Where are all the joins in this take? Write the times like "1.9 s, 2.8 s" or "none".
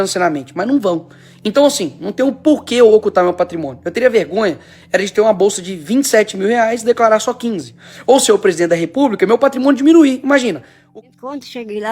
10.7 s